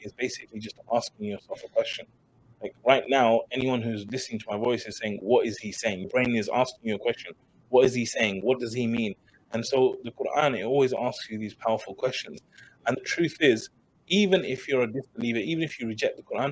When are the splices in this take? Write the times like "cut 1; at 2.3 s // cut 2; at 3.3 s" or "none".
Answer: none